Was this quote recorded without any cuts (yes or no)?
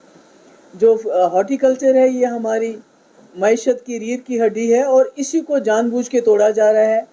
yes